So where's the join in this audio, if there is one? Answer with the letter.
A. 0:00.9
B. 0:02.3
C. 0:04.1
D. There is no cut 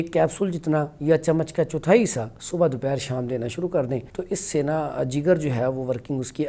C